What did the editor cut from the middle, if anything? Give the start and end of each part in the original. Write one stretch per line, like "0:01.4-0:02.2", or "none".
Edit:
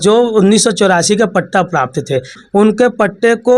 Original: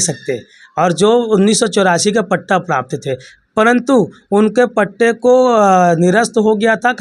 0:03.4-0:04.2

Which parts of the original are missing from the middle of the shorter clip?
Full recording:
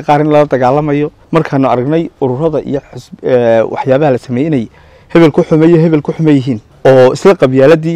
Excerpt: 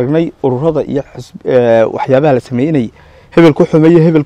none

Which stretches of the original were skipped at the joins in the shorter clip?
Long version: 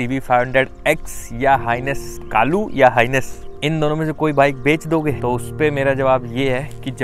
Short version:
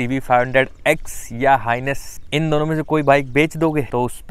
0:02.1-0:03.4

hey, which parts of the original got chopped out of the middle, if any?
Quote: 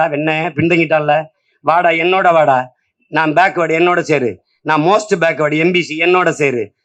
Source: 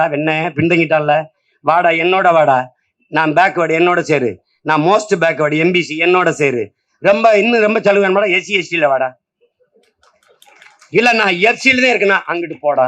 none

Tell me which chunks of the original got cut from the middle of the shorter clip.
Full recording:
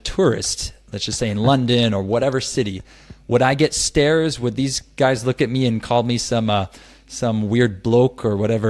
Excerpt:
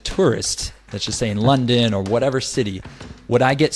none

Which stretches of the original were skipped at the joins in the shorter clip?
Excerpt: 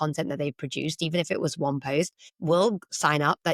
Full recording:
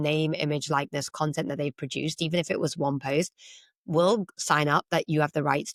0:03.4-0:03.7

